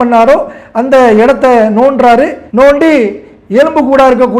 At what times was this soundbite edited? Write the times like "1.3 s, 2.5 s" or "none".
2.4 s